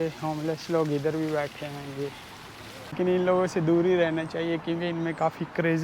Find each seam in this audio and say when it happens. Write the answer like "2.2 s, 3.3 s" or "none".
3.0 s